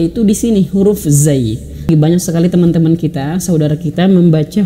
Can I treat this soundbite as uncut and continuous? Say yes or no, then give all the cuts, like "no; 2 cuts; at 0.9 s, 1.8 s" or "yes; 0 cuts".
no; 1 cut; at 1.9 s